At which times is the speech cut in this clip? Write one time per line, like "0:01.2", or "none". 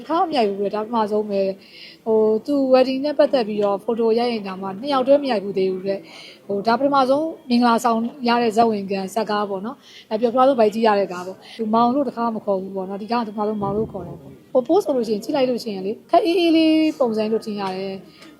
0:11.6
0:14.3
0:15.9